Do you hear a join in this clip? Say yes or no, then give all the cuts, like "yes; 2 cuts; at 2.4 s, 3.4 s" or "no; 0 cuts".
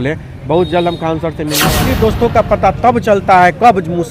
yes; 1 cut; at 1.7 s